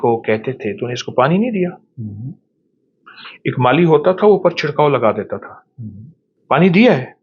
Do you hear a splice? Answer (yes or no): no